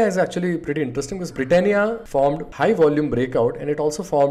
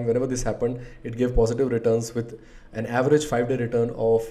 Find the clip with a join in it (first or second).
first